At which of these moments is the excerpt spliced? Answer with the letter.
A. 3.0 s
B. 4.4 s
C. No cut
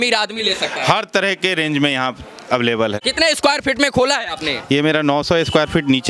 A